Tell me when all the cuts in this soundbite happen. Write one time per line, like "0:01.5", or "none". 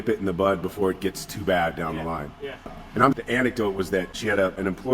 0:03.2